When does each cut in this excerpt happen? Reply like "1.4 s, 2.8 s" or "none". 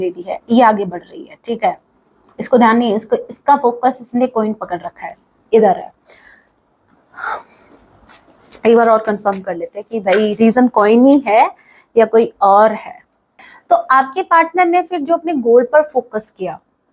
13.5 s